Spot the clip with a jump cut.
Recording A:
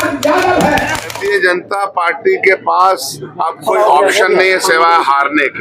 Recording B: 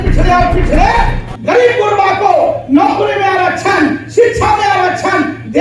A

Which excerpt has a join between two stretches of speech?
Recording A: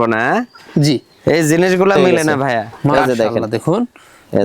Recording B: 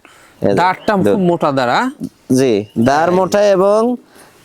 A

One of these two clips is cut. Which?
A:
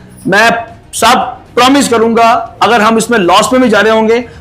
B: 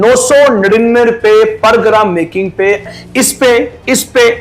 B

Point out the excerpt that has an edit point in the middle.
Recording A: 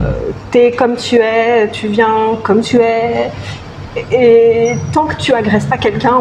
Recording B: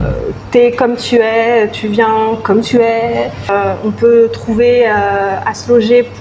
B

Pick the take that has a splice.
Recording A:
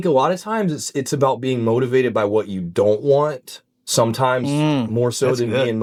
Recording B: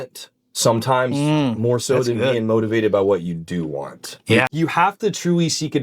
B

